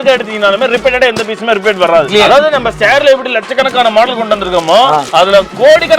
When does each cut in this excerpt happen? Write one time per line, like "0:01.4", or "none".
0:02.1